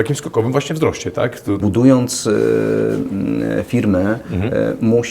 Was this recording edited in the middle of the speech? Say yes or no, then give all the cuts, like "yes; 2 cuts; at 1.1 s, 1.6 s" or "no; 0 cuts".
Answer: yes; 1 cut; at 1.6 s